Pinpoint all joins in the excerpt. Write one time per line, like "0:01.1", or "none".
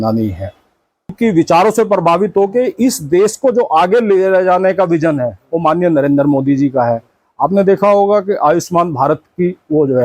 0:01.1